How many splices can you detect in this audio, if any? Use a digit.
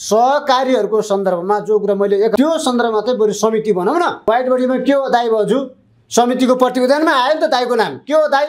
2